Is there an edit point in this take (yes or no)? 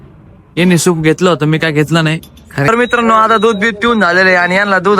yes